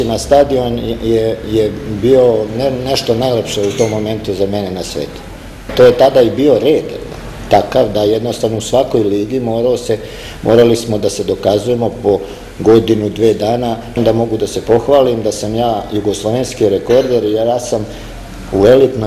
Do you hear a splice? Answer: yes; 2 cuts; at 5.7 s, 14.0 s

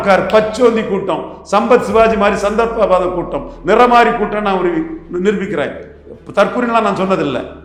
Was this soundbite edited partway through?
no; 0 cuts

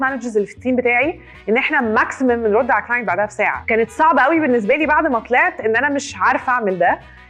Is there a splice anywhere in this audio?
no; 0 cuts

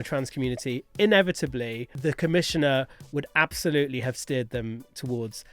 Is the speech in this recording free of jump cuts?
no; 1 cut; at 1.9 s

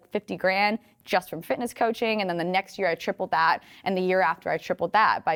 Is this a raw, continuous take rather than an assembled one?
yes; 0 cuts

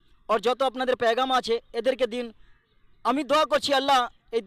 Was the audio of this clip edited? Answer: no; 0 cuts

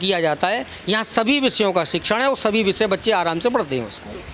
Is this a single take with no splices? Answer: yes; 0 cuts

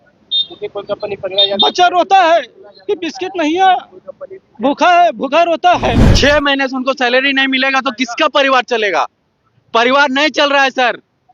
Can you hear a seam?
yes; 1 cut; at 6.1 s

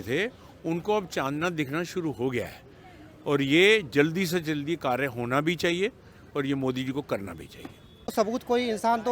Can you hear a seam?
yes; 1 cut; at 8.1 s

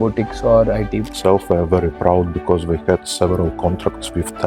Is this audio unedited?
no; 1 cut; at 1.1 s

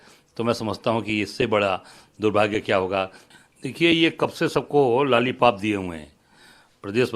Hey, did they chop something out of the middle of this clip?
yes; 1 cut; at 3.2 s

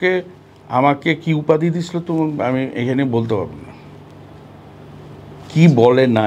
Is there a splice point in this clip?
no; 0 cuts

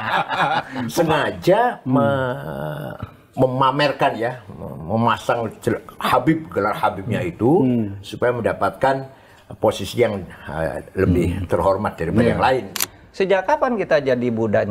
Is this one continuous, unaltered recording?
no; 1 cut; at 12.8 s

